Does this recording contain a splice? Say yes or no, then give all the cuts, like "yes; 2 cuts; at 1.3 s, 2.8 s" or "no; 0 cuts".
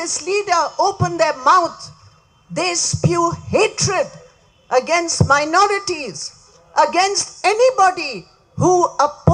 no; 0 cuts